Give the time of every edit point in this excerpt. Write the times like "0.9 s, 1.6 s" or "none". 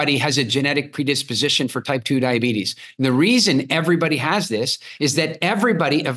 none